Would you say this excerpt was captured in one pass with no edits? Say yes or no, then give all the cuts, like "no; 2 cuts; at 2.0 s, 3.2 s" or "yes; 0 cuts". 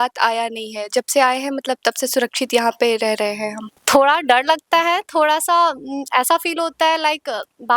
no; 1 cut; at 3.8 s